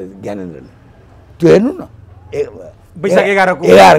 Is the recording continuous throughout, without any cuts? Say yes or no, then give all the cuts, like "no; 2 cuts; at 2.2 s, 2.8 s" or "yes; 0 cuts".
yes; 0 cuts